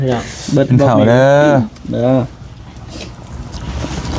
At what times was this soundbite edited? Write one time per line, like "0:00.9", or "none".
none